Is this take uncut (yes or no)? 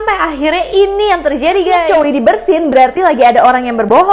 no